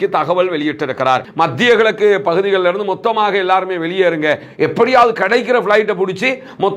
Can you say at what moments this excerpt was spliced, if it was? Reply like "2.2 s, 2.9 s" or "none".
1.3 s